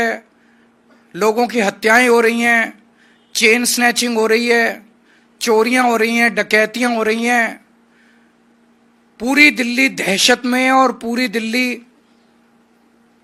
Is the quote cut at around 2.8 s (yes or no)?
no